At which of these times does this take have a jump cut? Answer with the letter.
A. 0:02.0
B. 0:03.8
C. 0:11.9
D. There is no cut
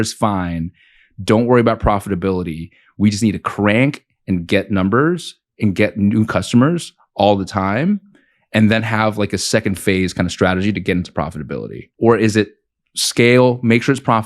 C